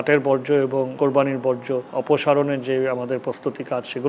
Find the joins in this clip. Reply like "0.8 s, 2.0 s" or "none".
0.9 s, 1.9 s